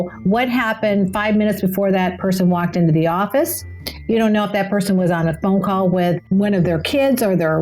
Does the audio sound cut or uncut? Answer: cut